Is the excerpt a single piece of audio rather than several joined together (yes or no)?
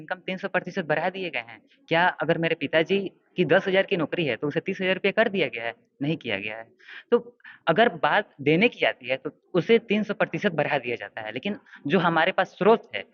yes